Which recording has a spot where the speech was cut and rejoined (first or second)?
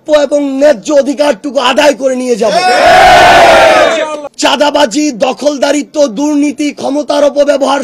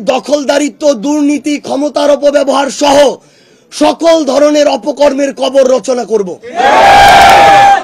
first